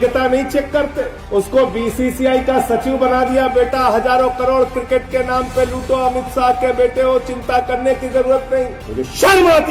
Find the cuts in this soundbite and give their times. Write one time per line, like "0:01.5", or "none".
0:08.8